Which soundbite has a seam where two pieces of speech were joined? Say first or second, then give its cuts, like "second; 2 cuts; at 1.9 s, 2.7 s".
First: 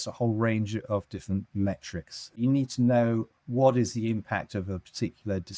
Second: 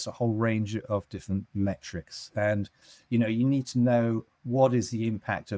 first; 1 cut; at 2.4 s